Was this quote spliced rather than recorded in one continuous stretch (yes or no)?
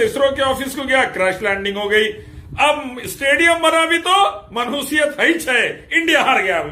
no